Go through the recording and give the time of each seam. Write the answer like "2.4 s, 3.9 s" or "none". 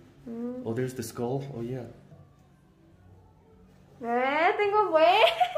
2.1 s